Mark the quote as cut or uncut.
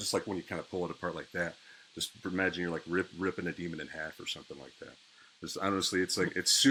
uncut